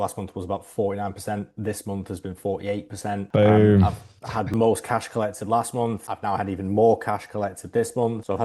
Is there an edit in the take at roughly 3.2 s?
no; 0 cuts

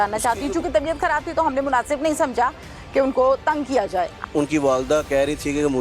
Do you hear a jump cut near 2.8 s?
no; 1 cut; at 4.2 s

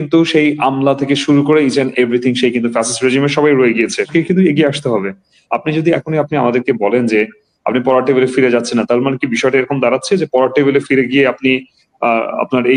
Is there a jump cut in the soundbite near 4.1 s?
yes; 1 cut; at 4.1 s

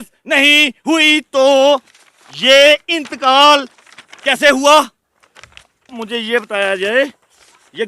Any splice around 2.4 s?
no; 1 cut; at 6.0 s

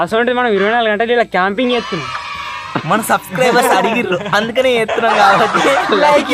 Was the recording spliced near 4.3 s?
no; 0 cuts

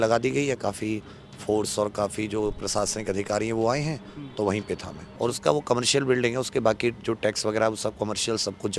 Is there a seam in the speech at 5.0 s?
yes; 1 cut; at 5.0 s

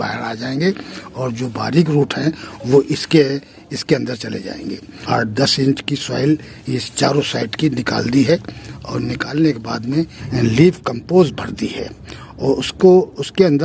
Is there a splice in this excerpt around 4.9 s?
yes; 1 cut; at 4.9 s

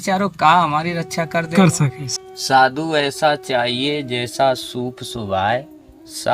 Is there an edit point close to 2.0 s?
yes; 1 cut; at 2.0 s

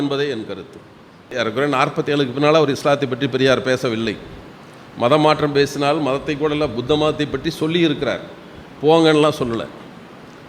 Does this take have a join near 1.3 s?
yes; 1 cut; at 1.3 s

